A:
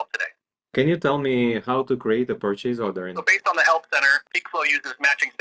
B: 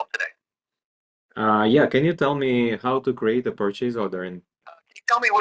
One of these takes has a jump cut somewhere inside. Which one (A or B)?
A